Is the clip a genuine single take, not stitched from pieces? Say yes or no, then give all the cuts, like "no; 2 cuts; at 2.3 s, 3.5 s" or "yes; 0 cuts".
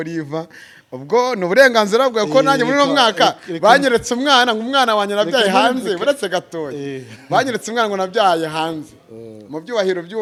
yes; 0 cuts